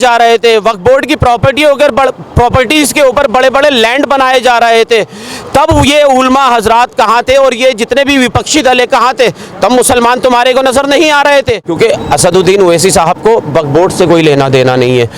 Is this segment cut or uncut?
cut